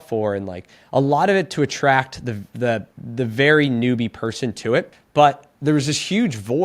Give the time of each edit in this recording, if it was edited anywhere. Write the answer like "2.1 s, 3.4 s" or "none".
3.0 s, 5.0 s